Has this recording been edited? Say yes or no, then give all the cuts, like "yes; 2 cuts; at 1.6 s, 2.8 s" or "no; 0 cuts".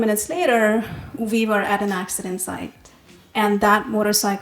no; 0 cuts